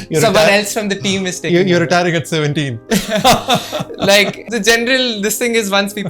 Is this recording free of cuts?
no; 1 cut; at 4.4 s

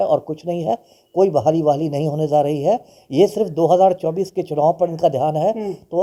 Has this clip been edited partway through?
no; 0 cuts

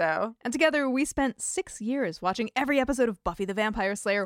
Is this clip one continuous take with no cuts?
yes; 0 cuts

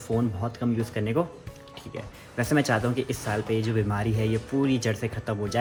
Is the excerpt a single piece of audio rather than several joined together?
yes; 0 cuts

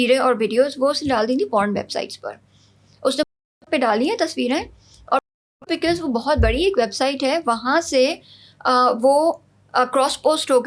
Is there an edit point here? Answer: no; 0 cuts

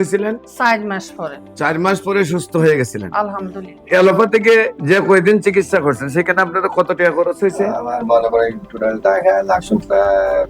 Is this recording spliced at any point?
yes; 1 cut; at 3.8 s

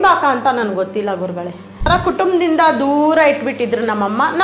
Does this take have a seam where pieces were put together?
yes; 1 cut; at 1.9 s

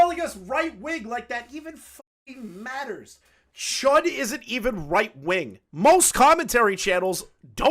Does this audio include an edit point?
yes; 1 cut; at 5.6 s

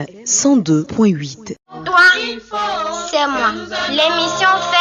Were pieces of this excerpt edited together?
yes; 1 cut; at 1.7 s

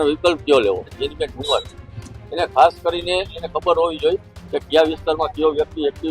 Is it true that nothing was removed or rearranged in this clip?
no; 1 cut; at 1.0 s

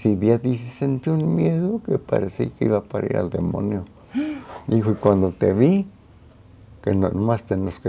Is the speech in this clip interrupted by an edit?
no; 0 cuts

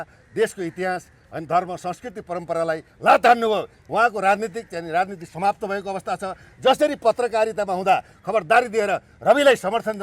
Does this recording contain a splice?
yes; 1 cut; at 3.8 s

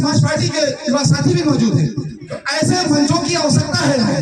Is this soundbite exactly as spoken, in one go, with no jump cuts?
yes; 0 cuts

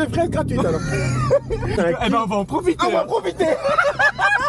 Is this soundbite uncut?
yes; 0 cuts

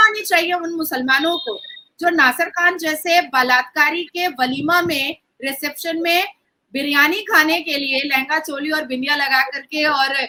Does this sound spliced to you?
no; 0 cuts

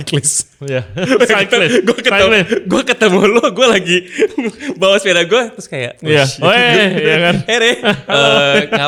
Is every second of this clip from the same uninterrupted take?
yes; 0 cuts

